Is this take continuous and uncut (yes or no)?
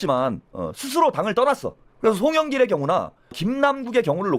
no